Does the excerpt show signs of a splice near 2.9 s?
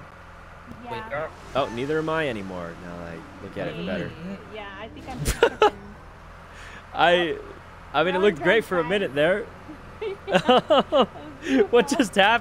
no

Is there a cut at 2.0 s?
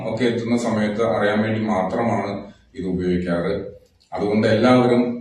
yes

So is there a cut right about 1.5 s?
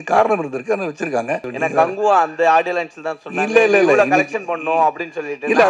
yes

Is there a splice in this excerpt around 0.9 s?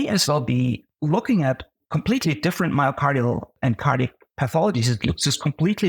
yes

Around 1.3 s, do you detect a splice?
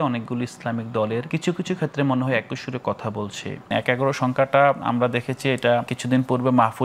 yes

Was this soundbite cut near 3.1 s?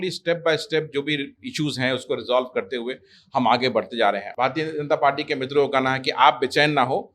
no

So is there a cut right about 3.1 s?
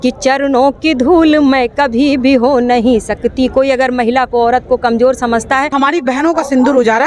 no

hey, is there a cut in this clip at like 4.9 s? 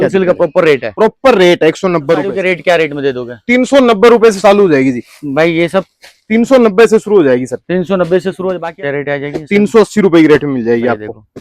no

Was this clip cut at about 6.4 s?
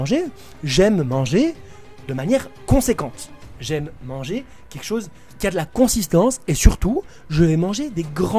no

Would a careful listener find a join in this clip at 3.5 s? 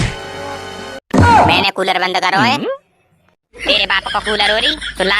yes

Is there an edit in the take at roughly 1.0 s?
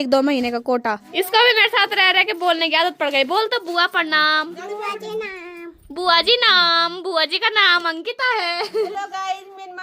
yes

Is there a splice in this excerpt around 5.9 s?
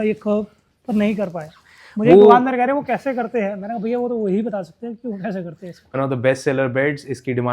yes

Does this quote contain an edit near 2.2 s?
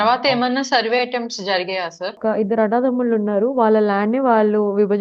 yes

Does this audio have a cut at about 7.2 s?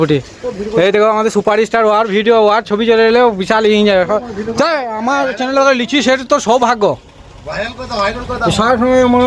no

